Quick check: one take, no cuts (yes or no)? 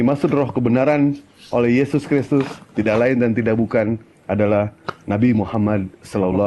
yes